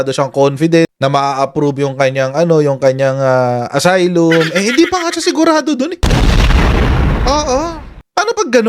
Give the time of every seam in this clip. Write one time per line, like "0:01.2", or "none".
0:00.9